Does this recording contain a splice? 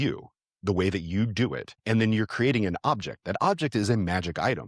yes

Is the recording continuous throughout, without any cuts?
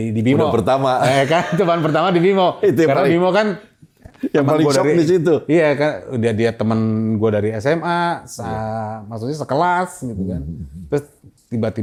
yes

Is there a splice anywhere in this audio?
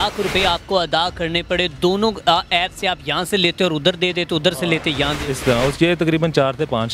no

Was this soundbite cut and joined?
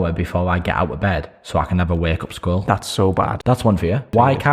yes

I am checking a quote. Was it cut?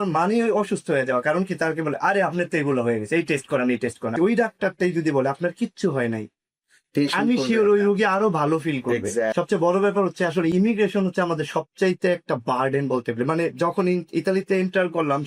yes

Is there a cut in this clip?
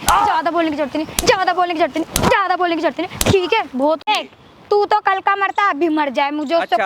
yes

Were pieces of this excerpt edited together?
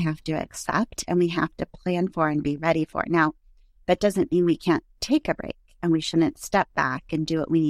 no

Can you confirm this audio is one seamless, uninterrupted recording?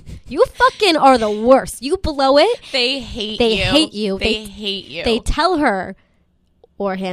yes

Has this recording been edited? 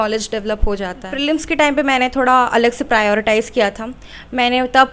yes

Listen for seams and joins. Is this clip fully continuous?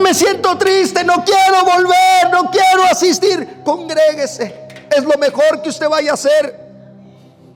yes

